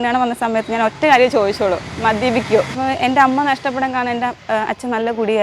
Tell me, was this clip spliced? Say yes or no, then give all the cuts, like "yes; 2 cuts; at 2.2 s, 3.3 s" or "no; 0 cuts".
yes; 2 cuts; at 2.7 s, 4.4 s